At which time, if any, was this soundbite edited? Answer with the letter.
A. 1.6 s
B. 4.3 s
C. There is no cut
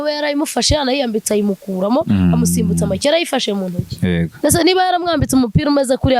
B